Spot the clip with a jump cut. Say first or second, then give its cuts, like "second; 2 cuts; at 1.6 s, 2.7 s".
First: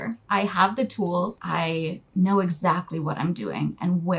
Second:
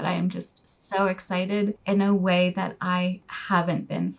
first; 1 cut; at 1.3 s